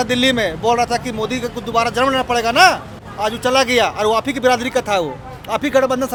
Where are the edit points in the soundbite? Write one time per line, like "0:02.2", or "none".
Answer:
none